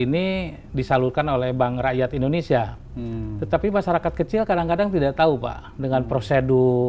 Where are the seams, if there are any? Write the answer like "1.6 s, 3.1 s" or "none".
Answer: none